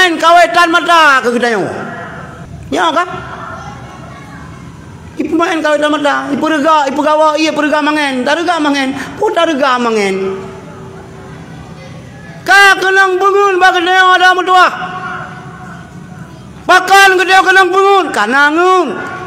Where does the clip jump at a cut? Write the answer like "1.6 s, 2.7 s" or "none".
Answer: none